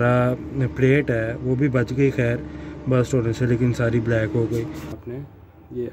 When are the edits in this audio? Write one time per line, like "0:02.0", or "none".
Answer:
0:04.9